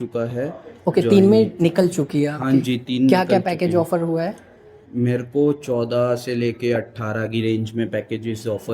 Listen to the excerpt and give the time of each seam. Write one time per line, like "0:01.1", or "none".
none